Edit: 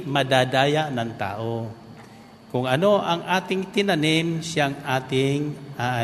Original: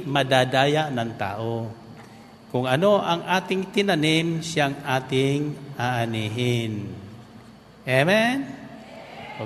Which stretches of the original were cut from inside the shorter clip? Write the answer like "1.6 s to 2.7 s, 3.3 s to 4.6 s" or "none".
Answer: none